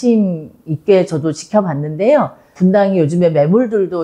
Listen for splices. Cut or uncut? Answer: cut